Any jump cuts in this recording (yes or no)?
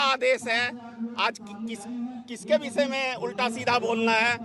no